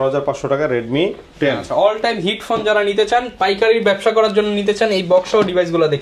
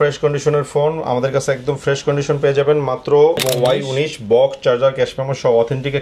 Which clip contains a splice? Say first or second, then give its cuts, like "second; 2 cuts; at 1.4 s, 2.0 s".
second; 1 cut; at 3.4 s